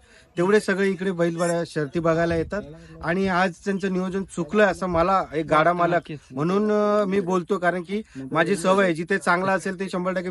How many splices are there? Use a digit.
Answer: 0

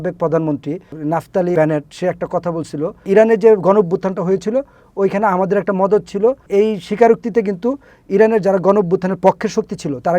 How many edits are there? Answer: 3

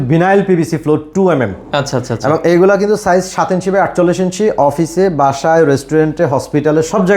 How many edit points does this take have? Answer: 0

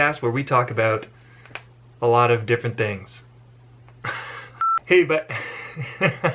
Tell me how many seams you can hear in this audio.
1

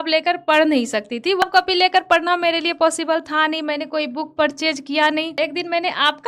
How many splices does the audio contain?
2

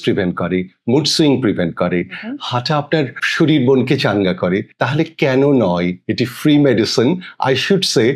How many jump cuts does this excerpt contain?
0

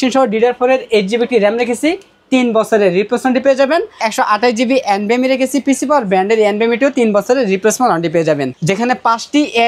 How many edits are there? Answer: 2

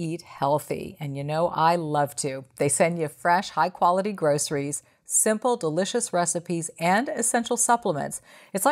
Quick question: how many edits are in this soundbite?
0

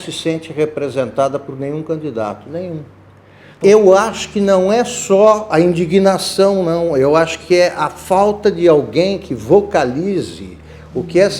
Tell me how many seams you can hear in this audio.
1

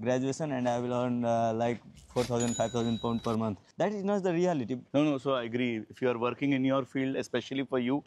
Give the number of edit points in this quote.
2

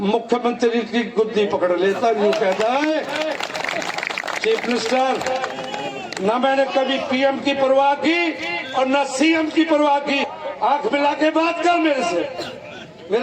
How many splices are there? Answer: 1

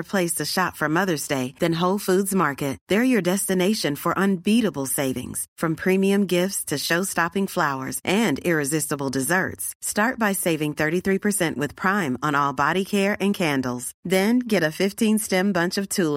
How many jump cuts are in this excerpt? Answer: 0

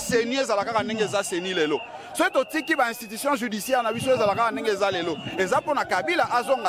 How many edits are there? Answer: 0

